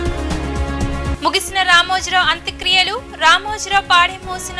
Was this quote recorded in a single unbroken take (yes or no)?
no